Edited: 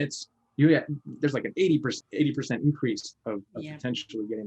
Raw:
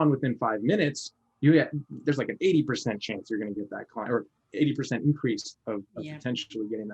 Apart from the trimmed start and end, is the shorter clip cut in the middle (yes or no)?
yes